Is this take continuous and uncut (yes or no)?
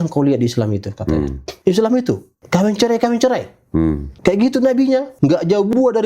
no